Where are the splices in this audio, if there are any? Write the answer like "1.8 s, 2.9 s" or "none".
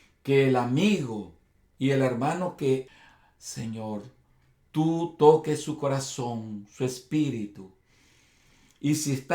2.9 s